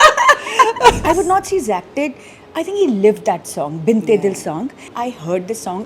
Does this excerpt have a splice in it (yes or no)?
yes